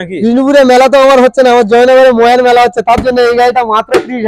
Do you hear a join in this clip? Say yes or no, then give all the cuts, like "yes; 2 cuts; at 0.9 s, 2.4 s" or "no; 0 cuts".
no; 0 cuts